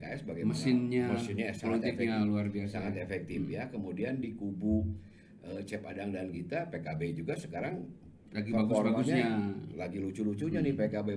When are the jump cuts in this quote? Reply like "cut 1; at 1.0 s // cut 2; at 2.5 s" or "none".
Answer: none